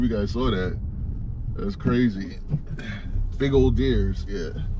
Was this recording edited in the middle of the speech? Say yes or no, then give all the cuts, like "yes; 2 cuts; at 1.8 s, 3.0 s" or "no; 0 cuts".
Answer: no; 0 cuts